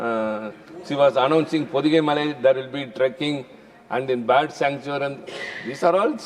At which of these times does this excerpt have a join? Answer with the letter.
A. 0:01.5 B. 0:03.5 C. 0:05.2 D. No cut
D